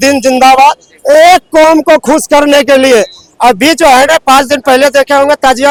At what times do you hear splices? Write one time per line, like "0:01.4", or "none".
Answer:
none